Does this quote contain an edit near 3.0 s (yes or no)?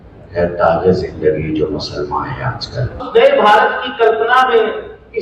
yes